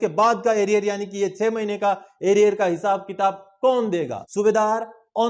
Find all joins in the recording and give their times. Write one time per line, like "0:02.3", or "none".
0:04.2